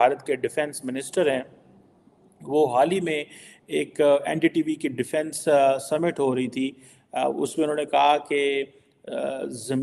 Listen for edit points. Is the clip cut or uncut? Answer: uncut